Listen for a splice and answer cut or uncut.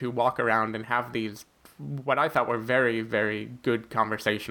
uncut